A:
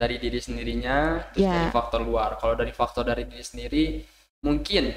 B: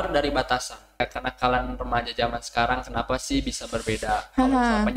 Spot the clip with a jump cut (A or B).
B